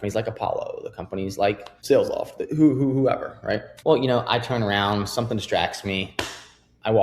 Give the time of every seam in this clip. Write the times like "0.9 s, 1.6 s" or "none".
1.7 s, 3.7 s